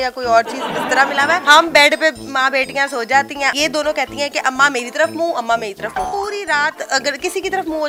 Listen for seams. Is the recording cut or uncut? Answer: uncut